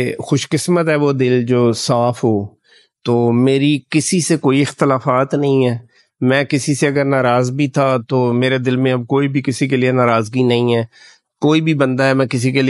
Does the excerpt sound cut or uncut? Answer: uncut